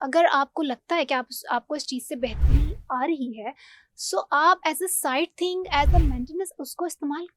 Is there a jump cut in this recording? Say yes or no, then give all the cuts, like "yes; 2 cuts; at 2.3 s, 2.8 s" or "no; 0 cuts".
no; 0 cuts